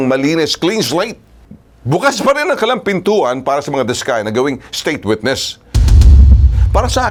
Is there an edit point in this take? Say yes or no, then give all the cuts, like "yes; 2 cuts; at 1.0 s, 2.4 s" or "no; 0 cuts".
no; 0 cuts